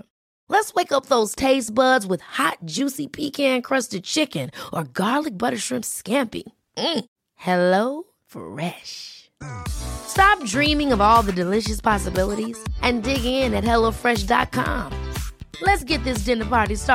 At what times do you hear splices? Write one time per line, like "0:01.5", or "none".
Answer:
none